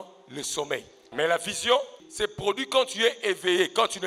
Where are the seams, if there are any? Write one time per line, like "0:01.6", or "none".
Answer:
0:01.1
0:02.0